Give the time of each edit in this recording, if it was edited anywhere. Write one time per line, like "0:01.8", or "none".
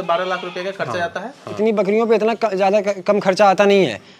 0:01.5

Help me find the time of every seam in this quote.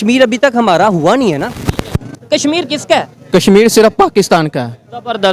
0:02.1

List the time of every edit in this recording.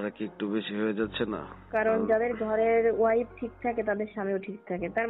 0:01.5

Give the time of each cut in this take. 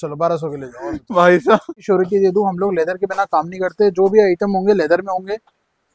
0:01.8

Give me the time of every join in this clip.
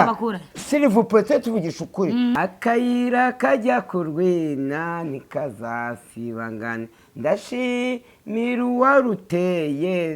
0:02.3

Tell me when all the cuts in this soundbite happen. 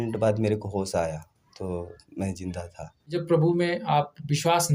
0:03.2

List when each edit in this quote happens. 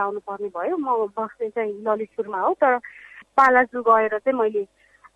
0:03.1

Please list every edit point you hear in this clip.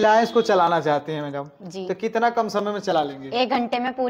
none

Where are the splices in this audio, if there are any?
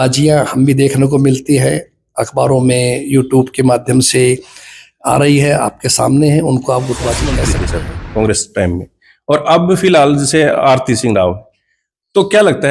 0:07.4

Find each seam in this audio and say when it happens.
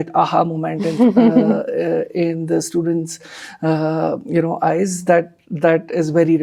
none

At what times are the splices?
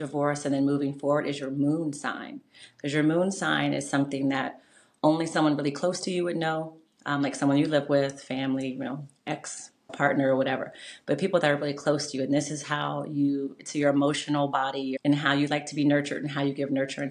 0:09.9
0:14.9

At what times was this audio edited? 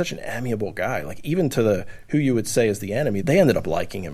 0:03.2

